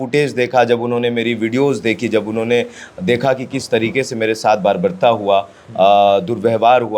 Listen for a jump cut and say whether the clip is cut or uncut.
uncut